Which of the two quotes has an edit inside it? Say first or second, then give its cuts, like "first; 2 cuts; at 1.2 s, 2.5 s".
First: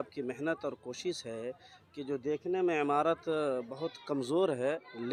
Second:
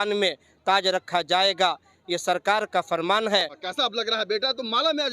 second; 1 cut; at 3.6 s